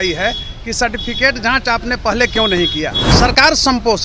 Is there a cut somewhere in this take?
yes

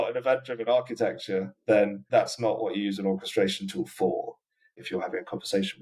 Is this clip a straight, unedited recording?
no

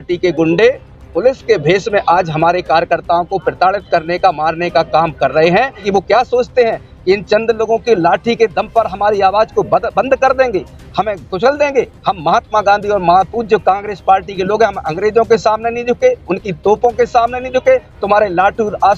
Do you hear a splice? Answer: yes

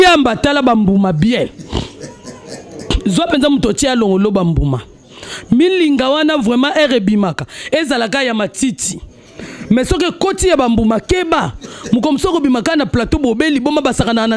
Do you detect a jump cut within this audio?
no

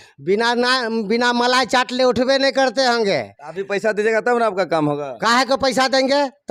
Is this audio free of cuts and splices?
yes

